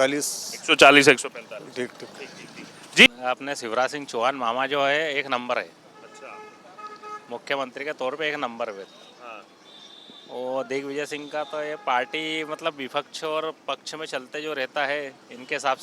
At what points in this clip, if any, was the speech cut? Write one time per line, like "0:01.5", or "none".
0:03.1